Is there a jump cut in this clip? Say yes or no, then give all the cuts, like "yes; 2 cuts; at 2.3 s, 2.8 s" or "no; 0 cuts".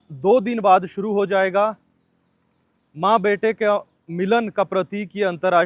no; 0 cuts